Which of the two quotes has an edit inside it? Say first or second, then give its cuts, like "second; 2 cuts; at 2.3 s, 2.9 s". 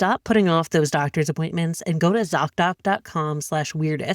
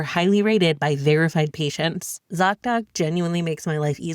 second; 1 cut; at 2.2 s